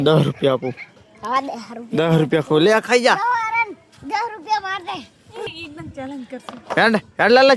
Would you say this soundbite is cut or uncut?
uncut